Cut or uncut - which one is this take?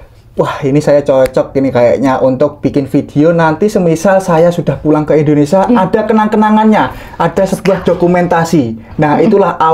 uncut